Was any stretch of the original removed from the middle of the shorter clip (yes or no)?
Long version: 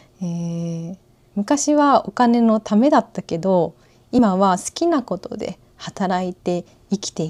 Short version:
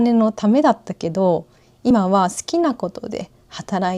no